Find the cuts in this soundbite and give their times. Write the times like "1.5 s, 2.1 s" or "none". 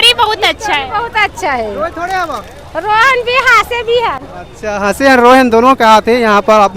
none